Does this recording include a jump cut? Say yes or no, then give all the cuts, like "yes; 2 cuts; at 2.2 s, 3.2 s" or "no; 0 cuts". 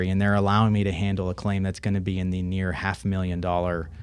no; 0 cuts